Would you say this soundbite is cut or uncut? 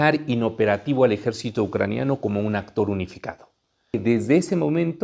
cut